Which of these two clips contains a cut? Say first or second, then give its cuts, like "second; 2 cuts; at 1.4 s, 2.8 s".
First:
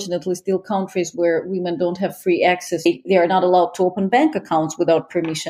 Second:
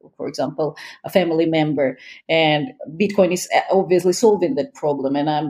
first; 1 cut; at 2.9 s